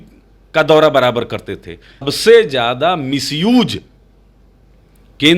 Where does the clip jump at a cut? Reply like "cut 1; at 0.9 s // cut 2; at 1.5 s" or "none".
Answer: cut 1; at 2.1 s